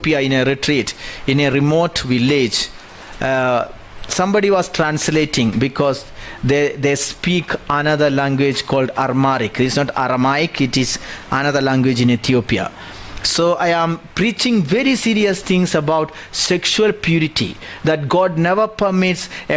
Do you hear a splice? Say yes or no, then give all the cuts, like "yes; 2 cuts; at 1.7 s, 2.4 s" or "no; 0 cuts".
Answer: no; 0 cuts